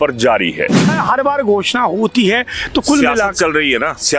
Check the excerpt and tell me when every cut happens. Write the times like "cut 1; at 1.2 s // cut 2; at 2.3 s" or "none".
cut 1; at 1.0 s

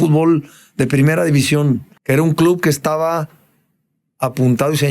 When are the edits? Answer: cut 1; at 1.9 s

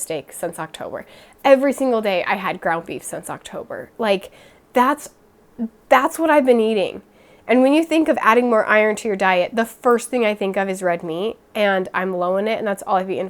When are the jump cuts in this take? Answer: none

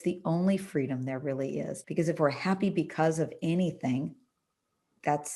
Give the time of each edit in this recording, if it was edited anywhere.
cut 1; at 1.8 s

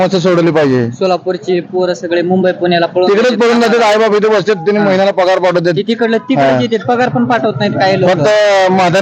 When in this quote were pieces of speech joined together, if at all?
none

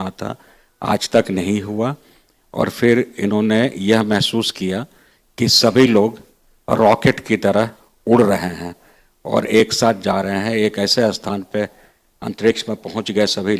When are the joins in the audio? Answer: none

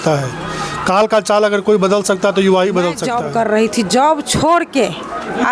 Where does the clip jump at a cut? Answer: cut 1; at 3.1 s

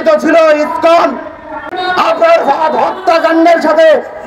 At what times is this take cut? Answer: cut 1; at 1.6 s

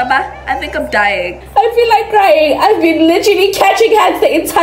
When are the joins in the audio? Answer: cut 1; at 1.4 s

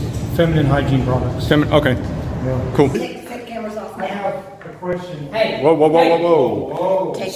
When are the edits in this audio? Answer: cut 1; at 2.9 s

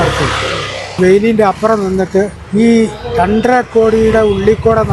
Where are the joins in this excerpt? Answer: cut 1; at 0.9 s // cut 2; at 2.4 s

